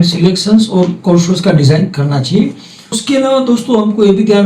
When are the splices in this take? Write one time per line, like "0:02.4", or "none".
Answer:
0:03.0